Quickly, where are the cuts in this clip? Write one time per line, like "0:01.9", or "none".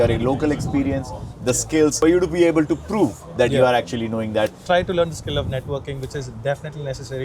0:02.0
0:04.6